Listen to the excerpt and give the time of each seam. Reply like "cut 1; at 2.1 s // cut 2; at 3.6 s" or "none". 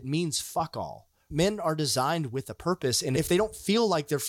cut 1; at 1.3 s // cut 2; at 3.2 s